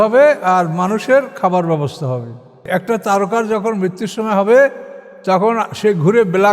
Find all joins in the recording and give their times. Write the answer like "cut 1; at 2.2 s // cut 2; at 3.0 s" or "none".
cut 1; at 2.6 s